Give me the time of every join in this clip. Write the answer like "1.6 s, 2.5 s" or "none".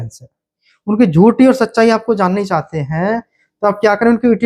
none